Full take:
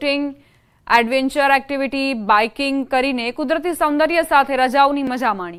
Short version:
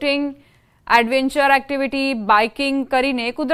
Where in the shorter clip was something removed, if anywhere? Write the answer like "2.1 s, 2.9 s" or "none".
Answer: none